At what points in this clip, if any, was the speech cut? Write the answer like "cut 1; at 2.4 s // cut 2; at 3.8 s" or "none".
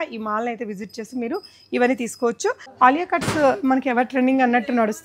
cut 1; at 2.6 s